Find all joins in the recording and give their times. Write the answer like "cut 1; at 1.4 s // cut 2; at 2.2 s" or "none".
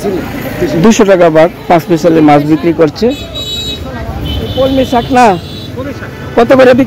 cut 1; at 4.5 s

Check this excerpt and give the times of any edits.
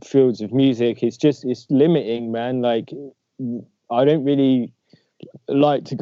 none

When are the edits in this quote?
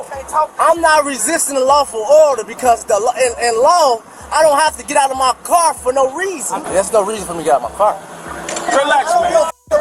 cut 1; at 8.7 s

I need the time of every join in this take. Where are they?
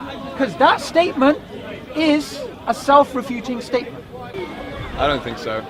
cut 1; at 4.3 s

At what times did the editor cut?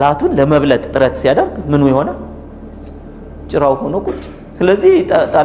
none

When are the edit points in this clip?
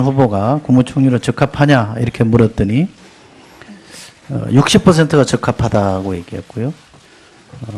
cut 1; at 1.8 s

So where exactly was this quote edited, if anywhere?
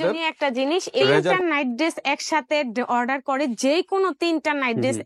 cut 1; at 1.4 s

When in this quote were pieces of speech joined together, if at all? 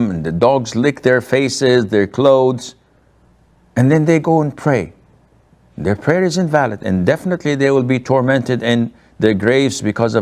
none

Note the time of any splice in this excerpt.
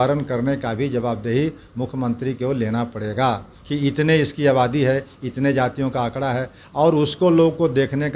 cut 1; at 3.5 s

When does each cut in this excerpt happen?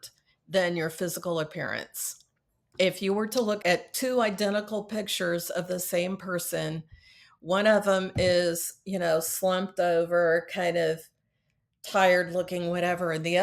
cut 1; at 3.6 s

